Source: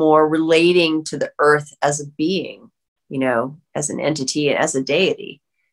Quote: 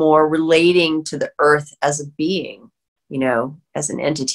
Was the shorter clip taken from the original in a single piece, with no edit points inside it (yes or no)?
yes